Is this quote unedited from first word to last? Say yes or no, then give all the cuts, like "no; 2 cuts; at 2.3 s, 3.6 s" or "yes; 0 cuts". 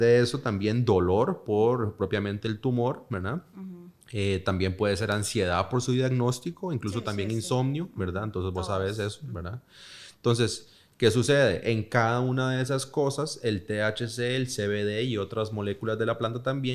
yes; 0 cuts